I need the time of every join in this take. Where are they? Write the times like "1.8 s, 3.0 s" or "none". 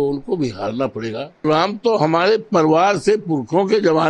1.4 s